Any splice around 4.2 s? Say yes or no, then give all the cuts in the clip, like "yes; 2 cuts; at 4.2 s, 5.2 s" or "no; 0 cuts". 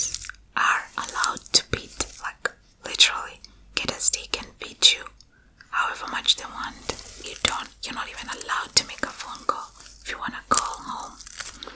no; 1 cut; at 7.3 s